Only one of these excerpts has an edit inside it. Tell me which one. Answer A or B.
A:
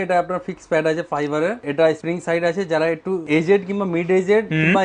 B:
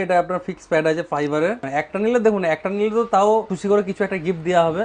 B